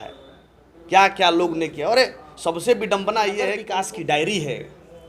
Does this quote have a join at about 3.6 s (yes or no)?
yes